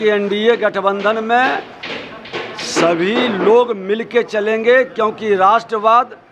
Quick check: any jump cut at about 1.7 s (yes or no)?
no